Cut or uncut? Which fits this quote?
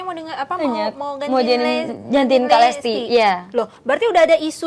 uncut